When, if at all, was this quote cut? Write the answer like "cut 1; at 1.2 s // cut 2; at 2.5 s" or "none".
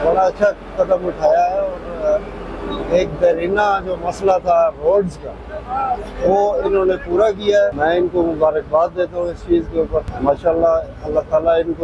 cut 1; at 7.7 s // cut 2; at 10.1 s

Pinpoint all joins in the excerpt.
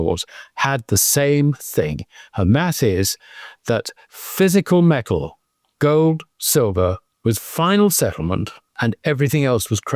cut 1; at 7.1 s // cut 2; at 8.6 s

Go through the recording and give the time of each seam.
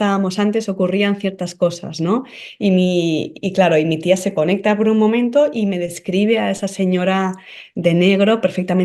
none

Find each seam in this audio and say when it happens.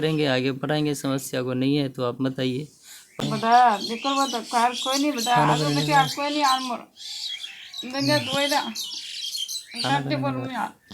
cut 1; at 3.2 s

